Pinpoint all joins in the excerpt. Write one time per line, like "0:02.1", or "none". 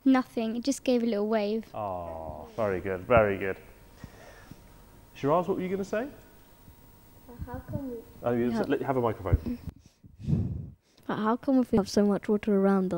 none